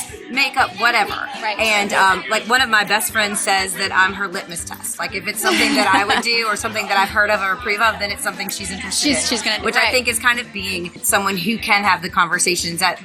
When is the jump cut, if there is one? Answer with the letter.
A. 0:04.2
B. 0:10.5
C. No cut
B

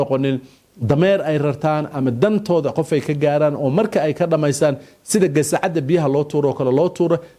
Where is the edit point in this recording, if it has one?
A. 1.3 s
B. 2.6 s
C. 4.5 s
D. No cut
D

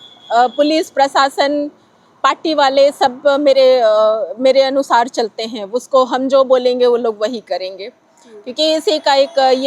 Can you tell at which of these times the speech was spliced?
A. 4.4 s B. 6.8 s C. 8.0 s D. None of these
D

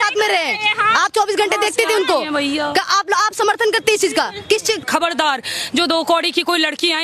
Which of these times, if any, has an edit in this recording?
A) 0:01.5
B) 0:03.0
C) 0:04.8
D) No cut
C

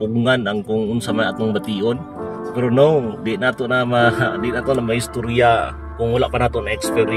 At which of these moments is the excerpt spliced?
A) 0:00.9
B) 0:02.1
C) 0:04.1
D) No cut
D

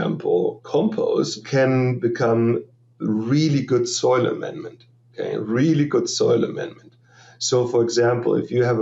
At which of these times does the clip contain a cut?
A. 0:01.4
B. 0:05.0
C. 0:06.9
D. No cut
A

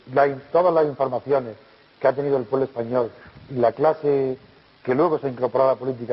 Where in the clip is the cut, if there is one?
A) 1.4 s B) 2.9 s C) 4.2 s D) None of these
A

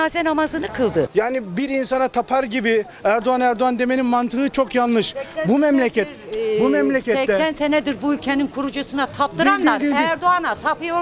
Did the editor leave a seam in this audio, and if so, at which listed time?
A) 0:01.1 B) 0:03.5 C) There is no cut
A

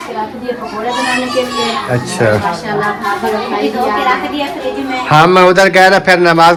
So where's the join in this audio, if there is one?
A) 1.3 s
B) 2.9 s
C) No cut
C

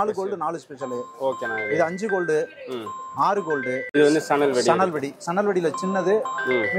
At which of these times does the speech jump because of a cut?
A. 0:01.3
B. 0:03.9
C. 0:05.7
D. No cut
B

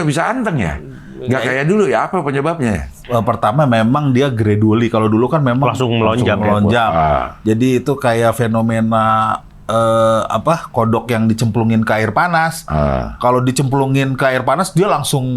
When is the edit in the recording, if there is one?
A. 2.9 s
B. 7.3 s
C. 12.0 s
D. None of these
A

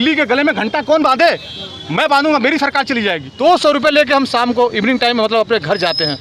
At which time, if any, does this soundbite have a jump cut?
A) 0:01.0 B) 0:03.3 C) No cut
B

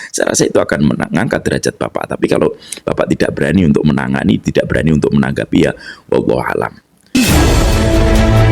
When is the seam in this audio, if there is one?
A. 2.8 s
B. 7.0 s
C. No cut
B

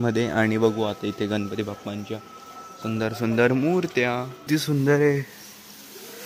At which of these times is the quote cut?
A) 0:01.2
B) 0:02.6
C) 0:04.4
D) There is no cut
C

